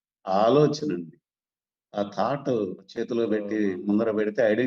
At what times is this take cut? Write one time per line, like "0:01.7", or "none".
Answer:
0:02.8